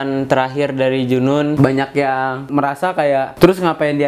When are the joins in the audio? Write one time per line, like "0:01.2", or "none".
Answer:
0:01.6
0:02.9